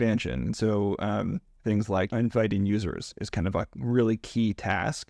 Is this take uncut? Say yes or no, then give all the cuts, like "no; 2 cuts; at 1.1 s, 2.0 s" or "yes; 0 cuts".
yes; 0 cuts